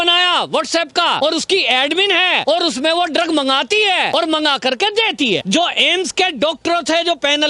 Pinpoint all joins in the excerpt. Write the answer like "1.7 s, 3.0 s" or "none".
1.2 s, 2.4 s, 4.1 s, 5.4 s